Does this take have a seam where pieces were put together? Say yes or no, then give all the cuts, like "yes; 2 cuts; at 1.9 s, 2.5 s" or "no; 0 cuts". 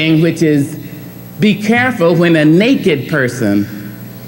no; 0 cuts